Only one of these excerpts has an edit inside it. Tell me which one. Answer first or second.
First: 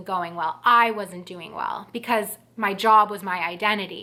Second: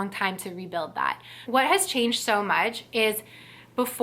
second